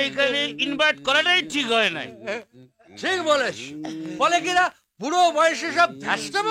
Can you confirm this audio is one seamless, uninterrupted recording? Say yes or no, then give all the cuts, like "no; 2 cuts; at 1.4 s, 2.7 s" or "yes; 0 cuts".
yes; 0 cuts